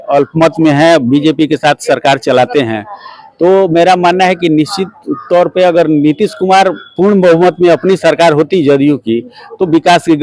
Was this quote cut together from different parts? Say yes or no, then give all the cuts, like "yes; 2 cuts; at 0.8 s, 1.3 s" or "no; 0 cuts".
no; 0 cuts